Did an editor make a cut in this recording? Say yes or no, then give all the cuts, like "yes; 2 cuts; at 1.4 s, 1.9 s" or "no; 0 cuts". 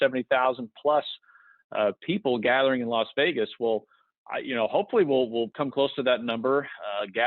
yes; 1 cut; at 5.5 s